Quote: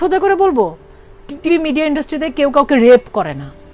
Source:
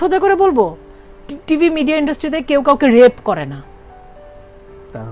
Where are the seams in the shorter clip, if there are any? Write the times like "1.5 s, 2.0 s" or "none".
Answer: 1.5 s

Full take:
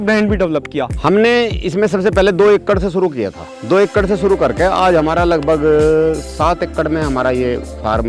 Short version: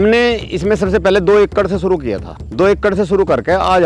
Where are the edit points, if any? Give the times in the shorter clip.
none

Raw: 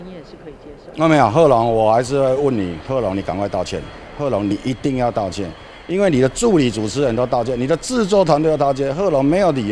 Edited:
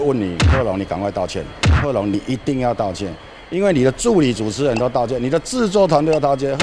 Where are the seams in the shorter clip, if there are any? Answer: none

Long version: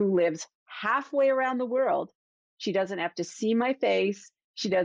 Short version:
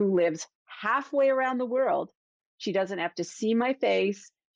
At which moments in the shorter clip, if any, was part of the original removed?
none

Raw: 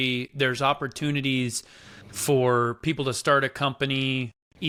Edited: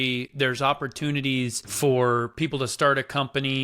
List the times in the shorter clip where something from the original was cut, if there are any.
1.6 s

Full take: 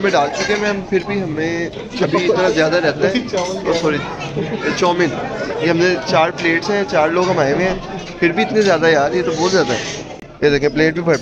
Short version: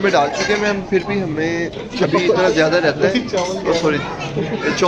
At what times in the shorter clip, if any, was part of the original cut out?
none

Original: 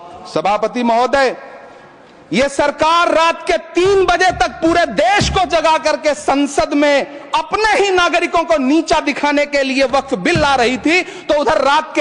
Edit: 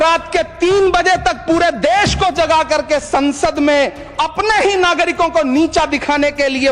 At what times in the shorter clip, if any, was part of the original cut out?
none

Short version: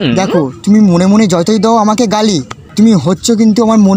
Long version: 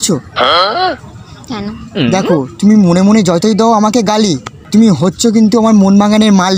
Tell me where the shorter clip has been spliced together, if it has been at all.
none

